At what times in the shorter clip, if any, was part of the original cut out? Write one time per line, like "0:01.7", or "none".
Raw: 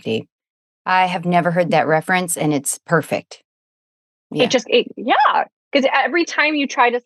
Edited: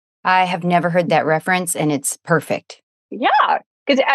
0:03.1